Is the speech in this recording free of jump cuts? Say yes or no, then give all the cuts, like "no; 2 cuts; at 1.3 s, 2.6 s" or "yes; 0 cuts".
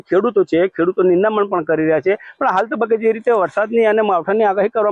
no; 1 cut; at 3.2 s